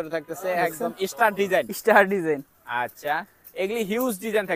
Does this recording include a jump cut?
no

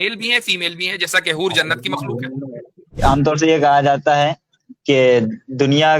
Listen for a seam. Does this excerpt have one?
yes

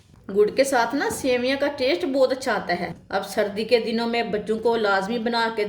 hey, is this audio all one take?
no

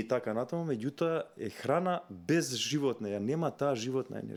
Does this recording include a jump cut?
no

